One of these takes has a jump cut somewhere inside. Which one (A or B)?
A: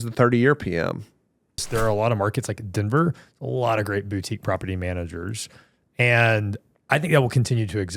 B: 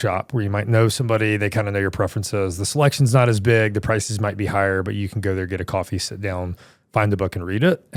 A